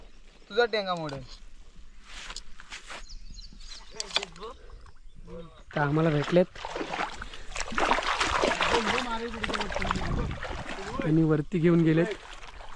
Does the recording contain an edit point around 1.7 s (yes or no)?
no